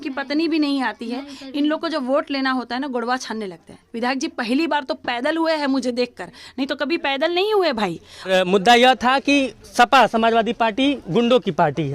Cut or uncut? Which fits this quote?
cut